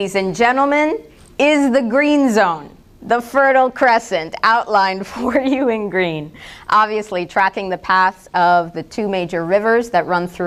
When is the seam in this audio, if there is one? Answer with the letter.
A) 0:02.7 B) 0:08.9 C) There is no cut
A